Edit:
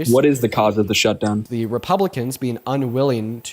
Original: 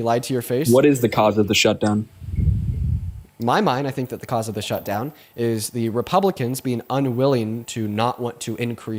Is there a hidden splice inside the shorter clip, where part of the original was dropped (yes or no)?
yes